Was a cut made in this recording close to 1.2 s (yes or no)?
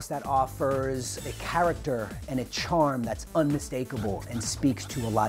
yes